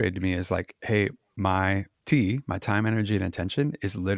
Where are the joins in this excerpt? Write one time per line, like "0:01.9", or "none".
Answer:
0:01.9